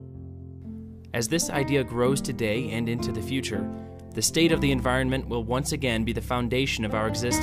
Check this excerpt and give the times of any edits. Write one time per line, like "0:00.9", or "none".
0:06.1